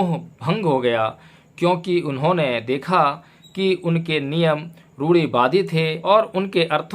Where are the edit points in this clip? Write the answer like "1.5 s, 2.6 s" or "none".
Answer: 5.9 s